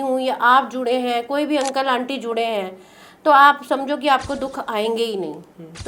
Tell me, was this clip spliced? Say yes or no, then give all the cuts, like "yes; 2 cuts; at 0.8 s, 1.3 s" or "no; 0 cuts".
no; 0 cuts